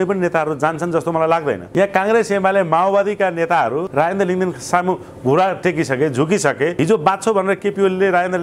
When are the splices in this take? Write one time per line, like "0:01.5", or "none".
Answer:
0:01.6
0:03.9
0:06.7